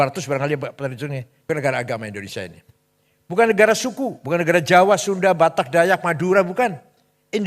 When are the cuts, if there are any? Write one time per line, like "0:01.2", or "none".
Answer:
0:01.3